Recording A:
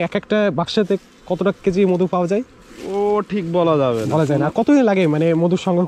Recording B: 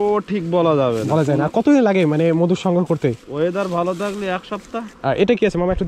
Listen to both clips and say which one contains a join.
B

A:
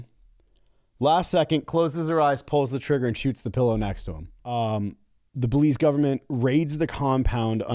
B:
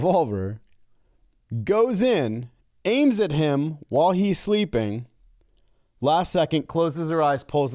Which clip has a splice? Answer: A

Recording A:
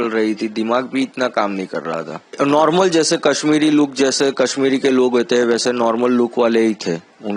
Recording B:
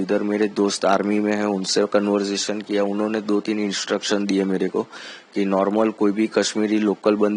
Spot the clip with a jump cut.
A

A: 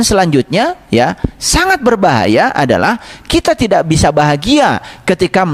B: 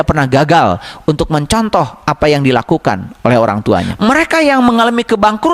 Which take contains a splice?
B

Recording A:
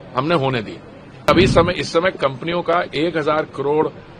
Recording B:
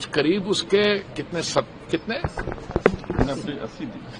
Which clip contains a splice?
A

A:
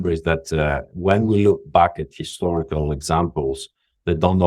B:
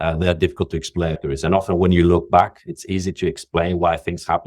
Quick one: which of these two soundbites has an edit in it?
B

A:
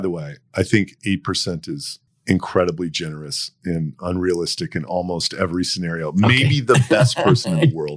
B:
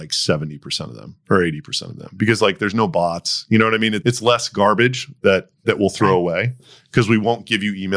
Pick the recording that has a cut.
A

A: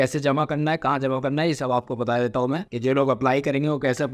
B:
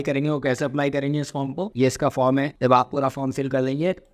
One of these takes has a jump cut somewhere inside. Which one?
B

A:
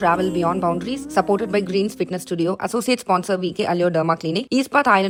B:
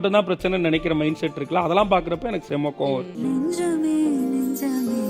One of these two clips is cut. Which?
B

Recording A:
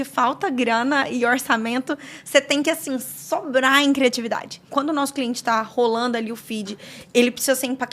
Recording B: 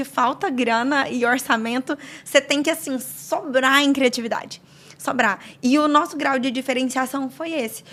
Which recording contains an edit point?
A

